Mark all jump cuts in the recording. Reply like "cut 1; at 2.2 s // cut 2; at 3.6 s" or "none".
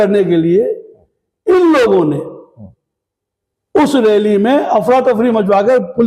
none